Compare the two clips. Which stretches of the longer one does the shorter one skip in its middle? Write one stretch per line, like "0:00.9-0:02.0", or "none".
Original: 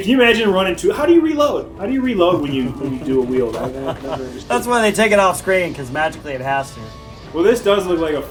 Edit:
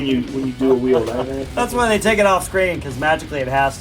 0:03.8-0:04.3